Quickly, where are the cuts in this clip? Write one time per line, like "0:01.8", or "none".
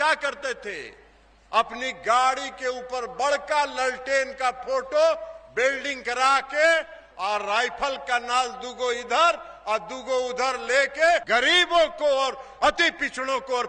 0:11.2